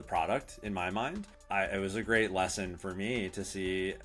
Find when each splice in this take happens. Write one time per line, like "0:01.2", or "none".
0:01.3